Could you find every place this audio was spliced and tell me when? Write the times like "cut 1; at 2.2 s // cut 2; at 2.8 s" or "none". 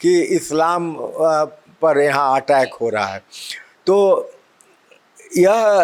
none